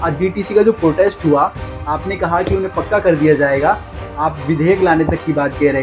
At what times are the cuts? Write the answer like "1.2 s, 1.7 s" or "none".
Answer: none